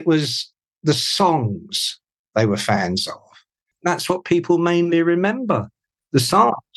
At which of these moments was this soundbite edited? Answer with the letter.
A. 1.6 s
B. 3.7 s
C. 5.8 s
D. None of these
B